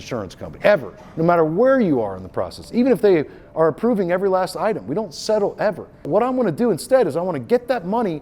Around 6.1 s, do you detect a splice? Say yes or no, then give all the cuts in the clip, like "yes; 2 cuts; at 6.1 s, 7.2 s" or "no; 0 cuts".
yes; 1 cut; at 6.1 s